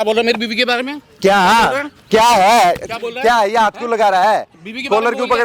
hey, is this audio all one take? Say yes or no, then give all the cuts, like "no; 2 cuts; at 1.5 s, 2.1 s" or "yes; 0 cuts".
yes; 0 cuts